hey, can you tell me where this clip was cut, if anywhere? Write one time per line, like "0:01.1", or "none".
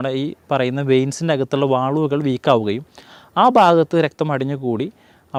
none